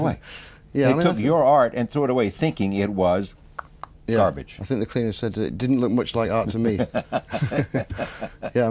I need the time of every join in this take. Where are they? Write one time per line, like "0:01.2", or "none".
none

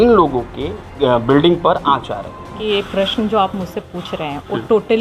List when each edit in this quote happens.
0:00.9
0:02.5

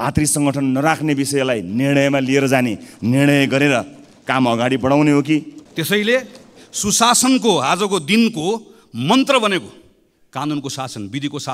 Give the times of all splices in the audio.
0:05.6

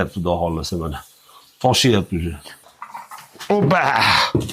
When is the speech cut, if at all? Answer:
0:02.6

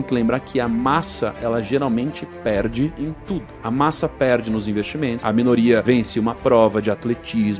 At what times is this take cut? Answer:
0:03.3
0:05.2
0:05.8

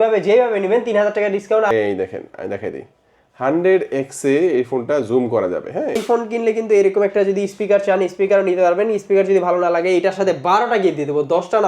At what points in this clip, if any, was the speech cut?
0:01.7
0:06.0

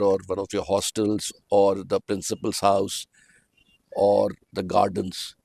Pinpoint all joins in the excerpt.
none

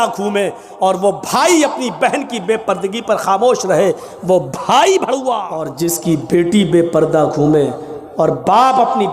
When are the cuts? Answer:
0:05.7

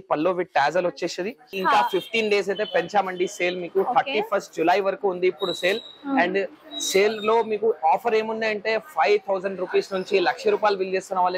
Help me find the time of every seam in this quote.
0:01.4

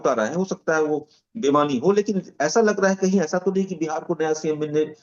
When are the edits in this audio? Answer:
none

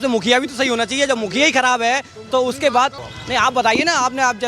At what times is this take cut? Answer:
0:03.1

